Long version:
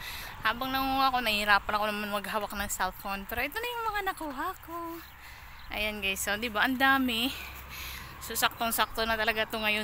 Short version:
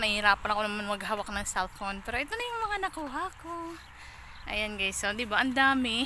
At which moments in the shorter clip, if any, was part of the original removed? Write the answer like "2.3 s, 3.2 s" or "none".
none